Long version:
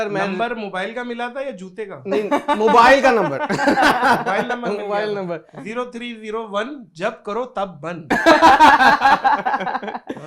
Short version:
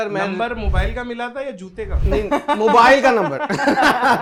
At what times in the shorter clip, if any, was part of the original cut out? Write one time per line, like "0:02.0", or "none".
none

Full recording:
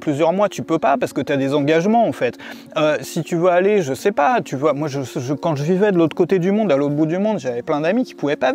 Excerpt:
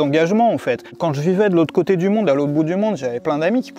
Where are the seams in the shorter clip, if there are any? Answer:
0:00.9

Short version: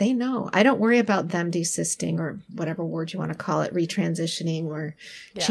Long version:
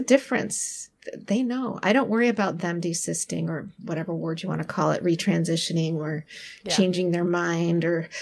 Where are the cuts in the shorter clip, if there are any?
none

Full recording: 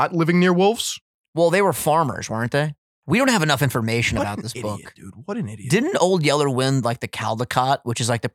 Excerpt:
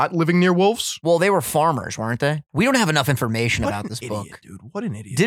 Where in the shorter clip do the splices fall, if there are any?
0:00.9
0:02.4

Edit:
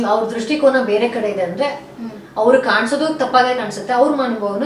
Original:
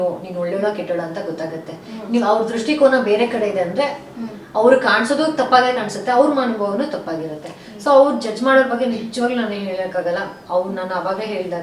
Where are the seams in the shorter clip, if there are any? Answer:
none

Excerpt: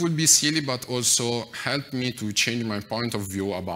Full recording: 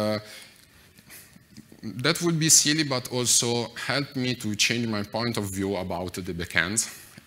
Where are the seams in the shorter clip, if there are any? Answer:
none

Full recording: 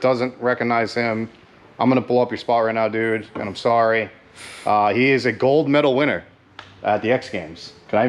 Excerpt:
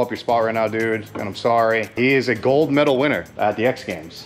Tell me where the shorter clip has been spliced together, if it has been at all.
0:02.0
0:03.3

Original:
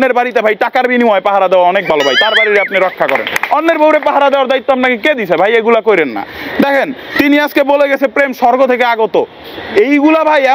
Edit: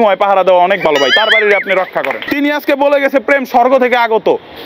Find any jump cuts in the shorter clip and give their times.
0:02.2

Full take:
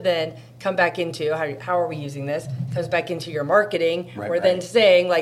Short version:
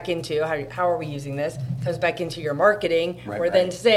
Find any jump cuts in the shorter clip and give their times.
none

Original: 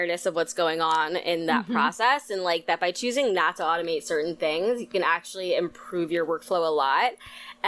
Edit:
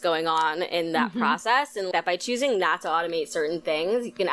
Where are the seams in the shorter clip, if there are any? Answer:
0:01.9

